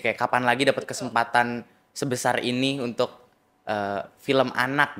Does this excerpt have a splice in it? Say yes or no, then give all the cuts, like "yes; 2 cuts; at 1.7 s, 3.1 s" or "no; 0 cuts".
no; 0 cuts